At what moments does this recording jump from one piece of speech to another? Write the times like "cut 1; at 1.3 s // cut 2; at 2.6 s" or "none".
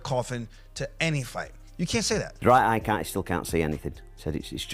cut 1; at 2.3 s